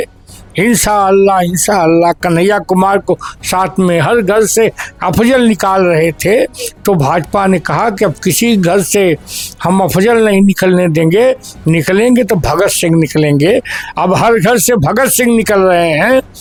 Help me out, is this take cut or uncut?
uncut